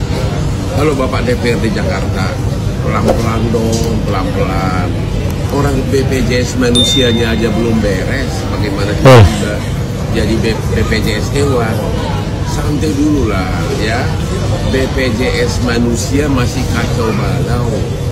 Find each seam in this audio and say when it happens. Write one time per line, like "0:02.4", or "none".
none